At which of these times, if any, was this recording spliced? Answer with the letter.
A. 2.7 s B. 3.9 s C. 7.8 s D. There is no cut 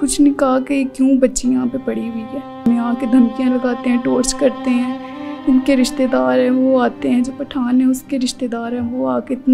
A